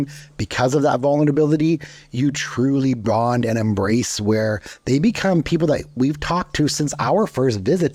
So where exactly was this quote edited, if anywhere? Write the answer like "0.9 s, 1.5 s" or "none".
none